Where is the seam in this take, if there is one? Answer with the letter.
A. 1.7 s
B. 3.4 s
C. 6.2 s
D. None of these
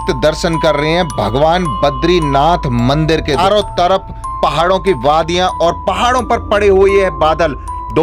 B